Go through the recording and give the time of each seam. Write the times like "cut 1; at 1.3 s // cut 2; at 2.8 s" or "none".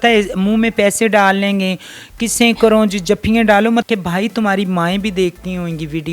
cut 1; at 3.8 s